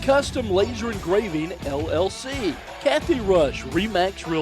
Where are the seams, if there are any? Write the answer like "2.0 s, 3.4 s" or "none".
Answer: 2.7 s